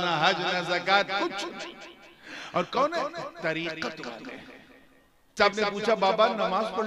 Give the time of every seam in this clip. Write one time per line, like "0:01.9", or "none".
0:05.3